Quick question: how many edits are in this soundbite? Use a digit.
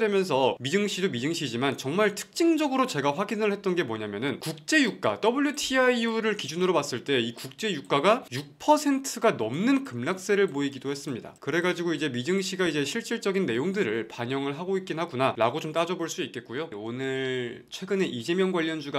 1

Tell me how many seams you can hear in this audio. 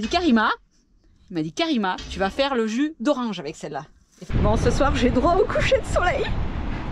1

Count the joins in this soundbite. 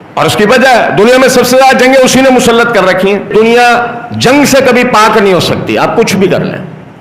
1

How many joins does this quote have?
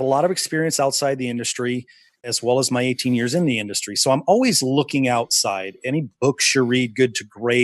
1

